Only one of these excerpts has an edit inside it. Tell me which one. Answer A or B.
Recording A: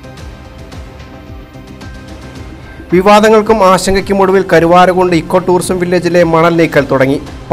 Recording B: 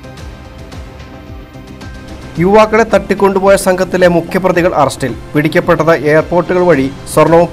B